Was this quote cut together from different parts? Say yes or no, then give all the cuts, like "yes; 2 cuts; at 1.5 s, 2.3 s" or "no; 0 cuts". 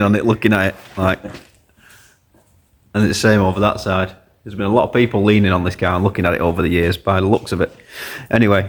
no; 0 cuts